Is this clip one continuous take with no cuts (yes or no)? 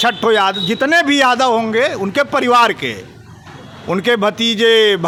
yes